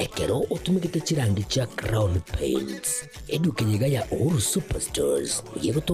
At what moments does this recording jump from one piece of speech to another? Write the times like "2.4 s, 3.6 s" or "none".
none